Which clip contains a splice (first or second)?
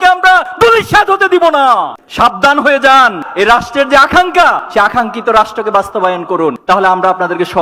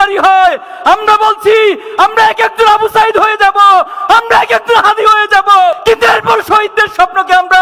first